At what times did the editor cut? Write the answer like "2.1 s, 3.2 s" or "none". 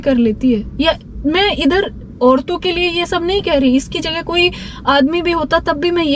none